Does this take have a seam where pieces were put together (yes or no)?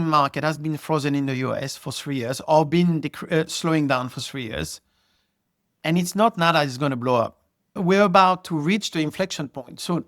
yes